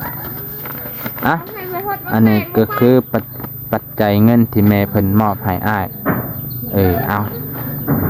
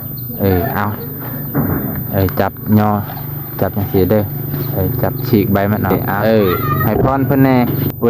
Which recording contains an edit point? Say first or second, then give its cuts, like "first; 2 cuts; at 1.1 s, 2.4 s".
second; 1 cut; at 6.8 s